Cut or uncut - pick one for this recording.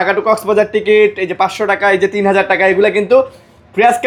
uncut